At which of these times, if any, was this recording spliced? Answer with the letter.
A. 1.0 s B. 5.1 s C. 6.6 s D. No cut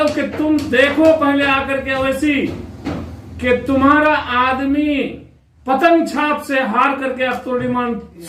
D